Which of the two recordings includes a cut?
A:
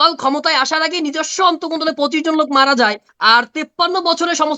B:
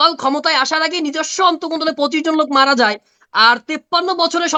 A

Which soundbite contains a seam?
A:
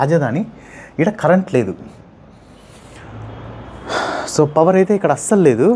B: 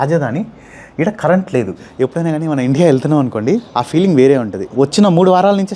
B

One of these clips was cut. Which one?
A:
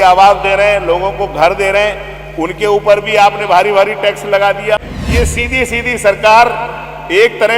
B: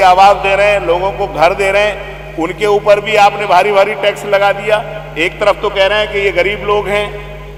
A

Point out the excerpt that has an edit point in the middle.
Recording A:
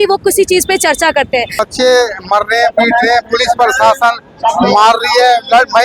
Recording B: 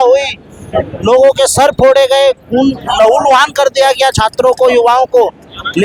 A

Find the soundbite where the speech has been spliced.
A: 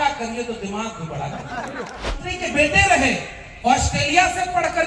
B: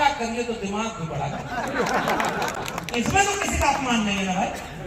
A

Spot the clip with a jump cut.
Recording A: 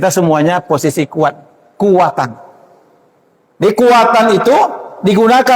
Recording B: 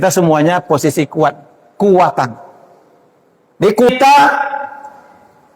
B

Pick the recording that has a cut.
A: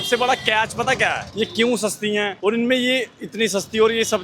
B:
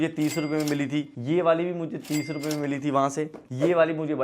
B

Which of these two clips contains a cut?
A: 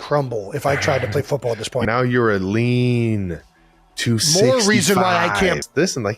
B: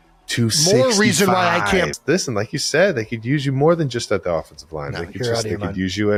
A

